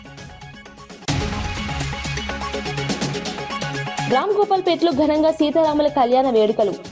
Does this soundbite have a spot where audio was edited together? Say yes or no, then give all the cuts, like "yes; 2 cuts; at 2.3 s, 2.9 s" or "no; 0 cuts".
yes; 2 cuts; at 1.1 s, 4.1 s